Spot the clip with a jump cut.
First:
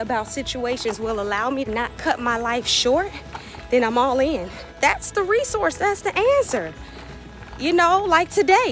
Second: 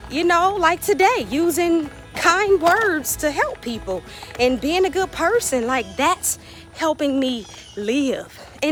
first; 2 cuts; at 1.7 s, 4.6 s

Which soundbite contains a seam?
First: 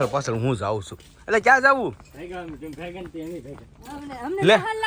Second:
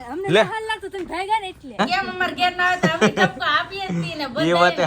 second; 1 cut; at 1.8 s

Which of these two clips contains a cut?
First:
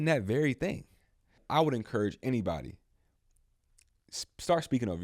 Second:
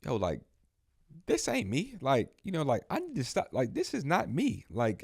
first; 1 cut; at 1.4 s

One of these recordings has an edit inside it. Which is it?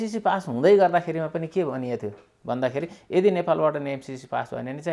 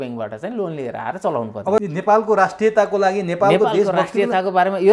second; 1 cut; at 1.8 s

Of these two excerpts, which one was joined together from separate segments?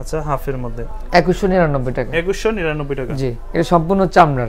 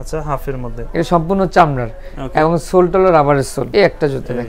second; 2 cuts; at 0.8 s, 3.6 s

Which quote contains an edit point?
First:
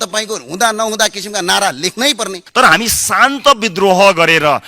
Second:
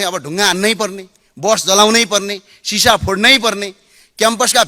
first; 1 cut; at 2.4 s

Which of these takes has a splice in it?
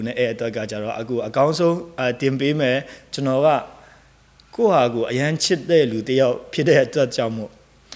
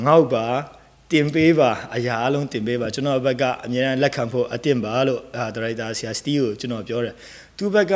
first; 1 cut; at 3.0 s

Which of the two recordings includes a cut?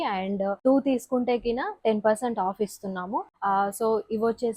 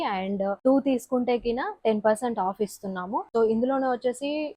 first; 1 cut; at 3.3 s

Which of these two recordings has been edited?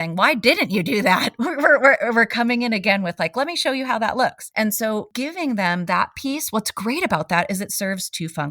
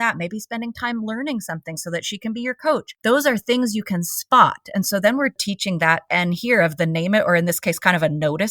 second; 2 cuts; at 2.9 s, 5.4 s

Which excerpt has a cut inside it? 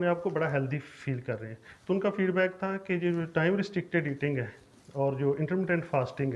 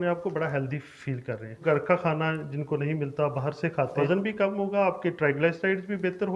second; 2 cuts; at 1.6 s, 4.0 s

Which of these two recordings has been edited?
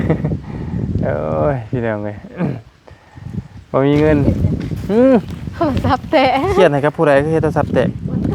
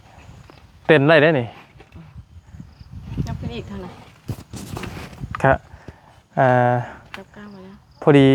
first; 1 cut; at 4.2 s

